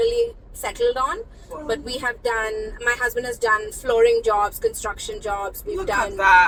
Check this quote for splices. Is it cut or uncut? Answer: uncut